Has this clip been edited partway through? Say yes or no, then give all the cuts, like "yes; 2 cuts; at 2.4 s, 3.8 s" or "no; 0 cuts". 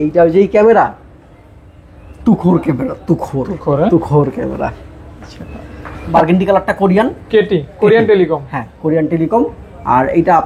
yes; 1 cut; at 6.1 s